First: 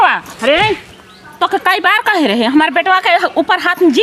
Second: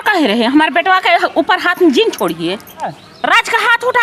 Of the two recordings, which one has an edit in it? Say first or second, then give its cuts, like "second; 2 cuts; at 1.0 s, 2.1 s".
second; 1 cut; at 3.0 s